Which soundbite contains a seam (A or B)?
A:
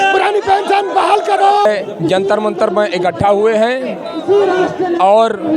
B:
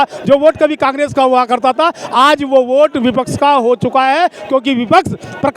A